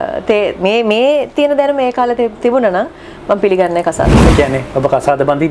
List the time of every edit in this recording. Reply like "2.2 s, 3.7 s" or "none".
none